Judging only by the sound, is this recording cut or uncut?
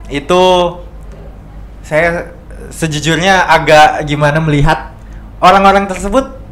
uncut